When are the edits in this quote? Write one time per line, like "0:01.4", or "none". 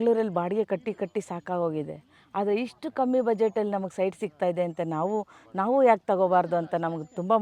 none